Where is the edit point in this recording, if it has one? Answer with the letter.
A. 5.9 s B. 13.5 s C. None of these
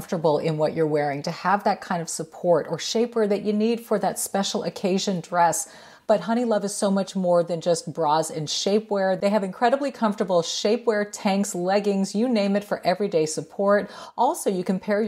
A